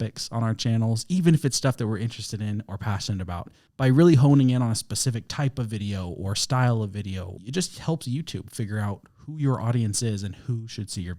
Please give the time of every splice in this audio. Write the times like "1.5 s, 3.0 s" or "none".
7.3 s